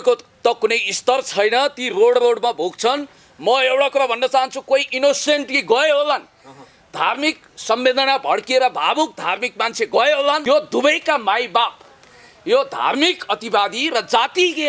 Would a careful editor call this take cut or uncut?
cut